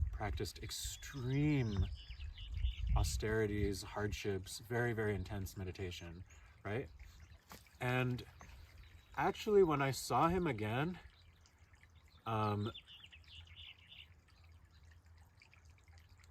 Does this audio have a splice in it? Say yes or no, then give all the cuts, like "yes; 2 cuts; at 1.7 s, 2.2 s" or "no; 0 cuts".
no; 0 cuts